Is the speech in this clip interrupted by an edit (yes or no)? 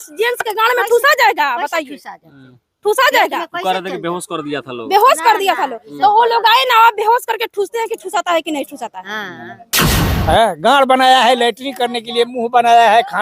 yes